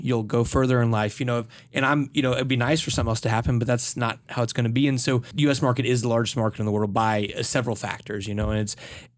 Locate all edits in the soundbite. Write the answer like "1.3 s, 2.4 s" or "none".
5.3 s